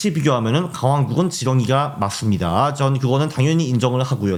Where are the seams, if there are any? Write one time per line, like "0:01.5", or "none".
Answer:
none